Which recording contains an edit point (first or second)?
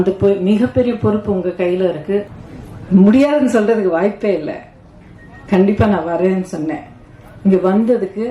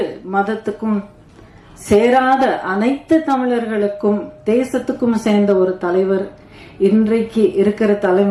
first